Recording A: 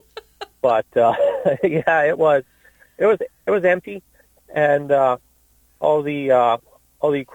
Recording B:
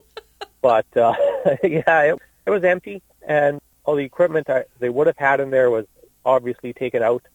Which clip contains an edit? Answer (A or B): B